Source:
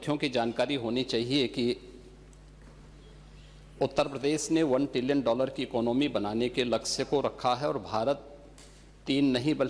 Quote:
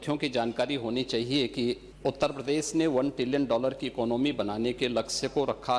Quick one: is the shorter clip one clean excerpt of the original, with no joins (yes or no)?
no